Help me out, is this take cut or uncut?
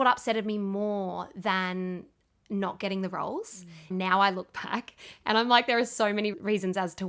cut